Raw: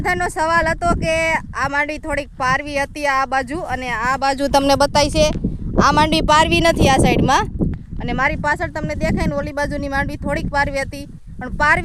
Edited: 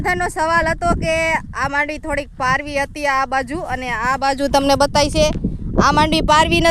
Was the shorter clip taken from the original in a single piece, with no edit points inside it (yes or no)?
yes